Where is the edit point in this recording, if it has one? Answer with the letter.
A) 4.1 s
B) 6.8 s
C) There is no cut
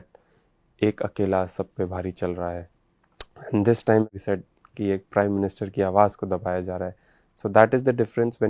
A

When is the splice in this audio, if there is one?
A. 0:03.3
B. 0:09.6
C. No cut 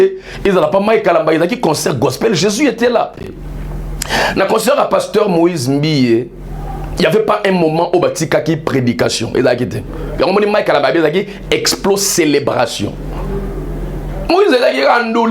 A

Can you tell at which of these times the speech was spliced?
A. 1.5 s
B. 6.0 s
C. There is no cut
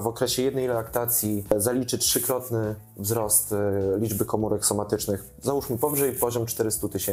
A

